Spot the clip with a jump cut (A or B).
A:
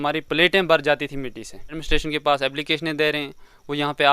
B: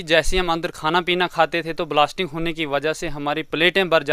A